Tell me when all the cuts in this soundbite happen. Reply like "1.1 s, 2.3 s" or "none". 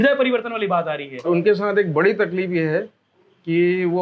1.5 s